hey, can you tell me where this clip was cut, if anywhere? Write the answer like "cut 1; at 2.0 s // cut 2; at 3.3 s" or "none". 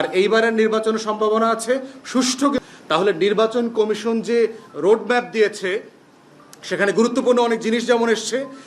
cut 1; at 2.6 s